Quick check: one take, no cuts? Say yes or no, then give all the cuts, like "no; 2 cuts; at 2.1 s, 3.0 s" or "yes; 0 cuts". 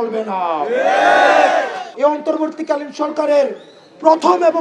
no; 1 cut; at 1.8 s